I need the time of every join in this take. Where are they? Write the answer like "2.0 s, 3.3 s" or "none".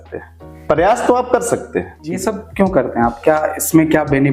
2.2 s

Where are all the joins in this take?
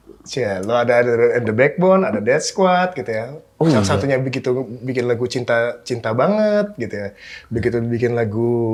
none

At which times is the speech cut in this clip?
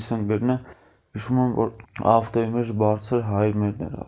1.8 s

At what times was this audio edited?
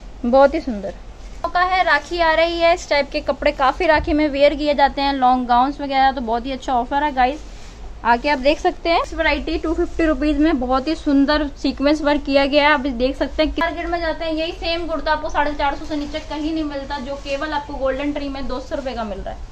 1.5 s, 9.1 s, 13.6 s

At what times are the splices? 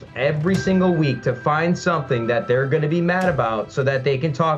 none

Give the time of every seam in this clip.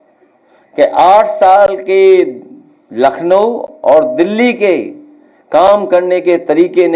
none

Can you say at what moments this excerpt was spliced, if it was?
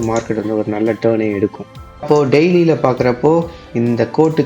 2.0 s

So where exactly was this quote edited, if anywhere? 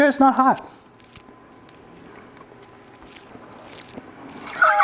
none

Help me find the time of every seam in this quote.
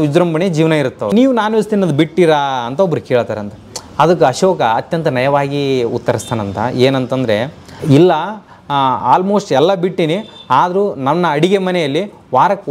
1.1 s, 7.8 s

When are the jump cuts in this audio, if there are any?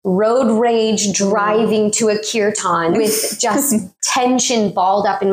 4.0 s

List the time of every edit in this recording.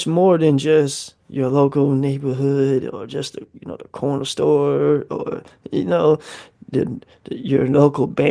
none

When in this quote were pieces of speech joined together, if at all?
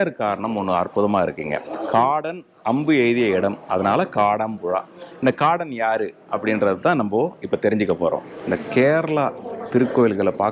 8.6 s

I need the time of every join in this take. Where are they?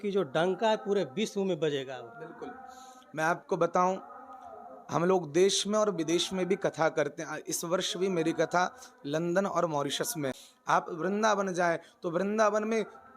10.5 s

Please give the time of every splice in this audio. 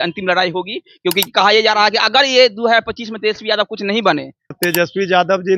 4.5 s

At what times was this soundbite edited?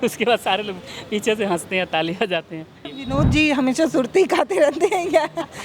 2.9 s

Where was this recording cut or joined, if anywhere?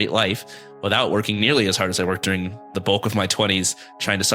2.7 s

